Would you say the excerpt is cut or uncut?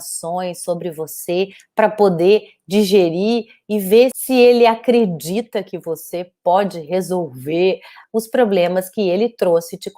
cut